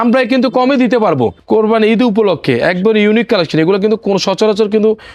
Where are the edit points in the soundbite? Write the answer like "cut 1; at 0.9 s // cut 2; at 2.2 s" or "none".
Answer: cut 1; at 1.4 s